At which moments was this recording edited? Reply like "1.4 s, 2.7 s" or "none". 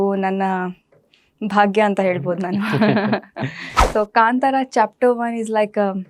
3.6 s